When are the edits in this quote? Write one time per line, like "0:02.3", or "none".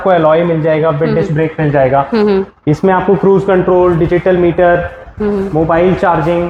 none